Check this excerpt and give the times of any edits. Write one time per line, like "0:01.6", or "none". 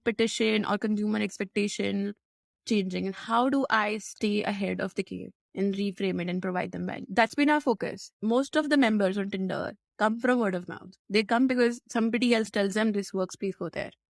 none